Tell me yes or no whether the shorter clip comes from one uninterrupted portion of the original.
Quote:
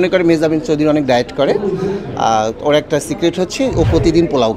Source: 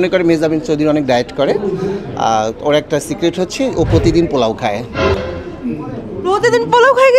yes